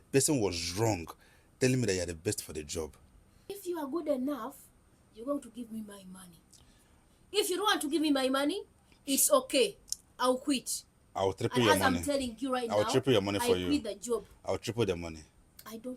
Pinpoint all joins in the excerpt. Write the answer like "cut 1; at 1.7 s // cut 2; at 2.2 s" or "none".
cut 1; at 3.6 s